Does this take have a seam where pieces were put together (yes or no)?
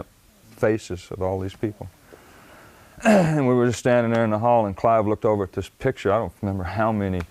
yes